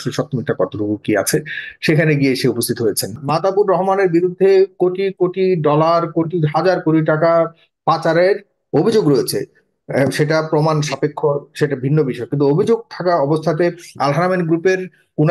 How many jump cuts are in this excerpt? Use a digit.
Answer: 1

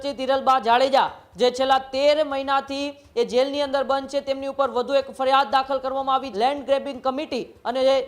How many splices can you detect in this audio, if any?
1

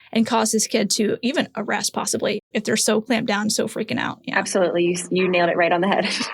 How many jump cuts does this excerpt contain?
2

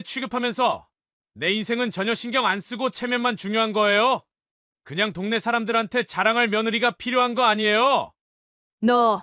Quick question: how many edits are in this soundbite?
1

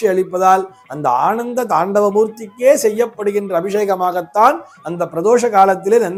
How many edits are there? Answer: 0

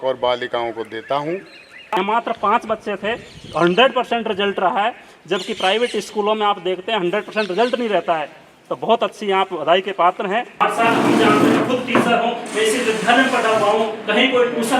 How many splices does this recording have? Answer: 2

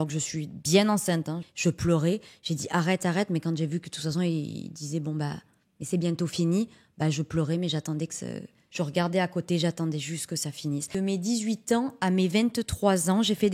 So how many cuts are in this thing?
3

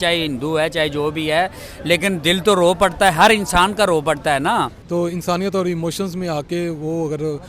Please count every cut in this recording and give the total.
1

